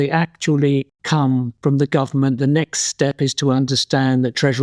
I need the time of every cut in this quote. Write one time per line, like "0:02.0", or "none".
0:01.3